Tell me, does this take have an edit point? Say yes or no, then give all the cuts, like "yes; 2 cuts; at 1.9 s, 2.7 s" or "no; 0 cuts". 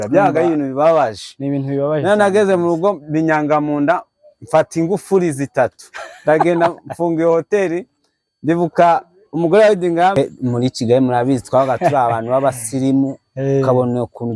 yes; 1 cut; at 10.1 s